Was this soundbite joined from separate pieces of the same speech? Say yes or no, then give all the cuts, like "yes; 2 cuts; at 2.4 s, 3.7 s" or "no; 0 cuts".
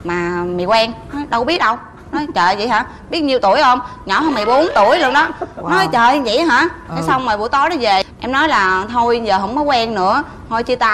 no; 0 cuts